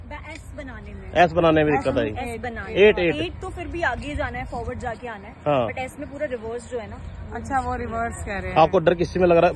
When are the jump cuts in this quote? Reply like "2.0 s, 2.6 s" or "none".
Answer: none